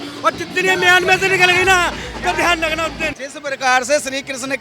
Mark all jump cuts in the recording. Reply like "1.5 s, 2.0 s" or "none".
3.1 s